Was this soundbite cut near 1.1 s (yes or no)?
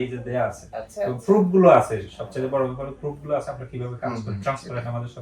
no